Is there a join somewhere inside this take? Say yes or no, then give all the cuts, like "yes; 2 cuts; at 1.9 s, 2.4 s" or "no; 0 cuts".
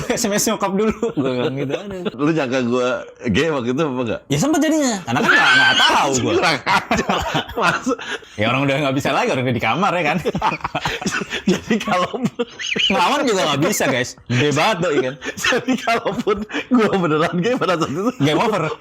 yes; 2 cuts; at 2.1 s, 8.1 s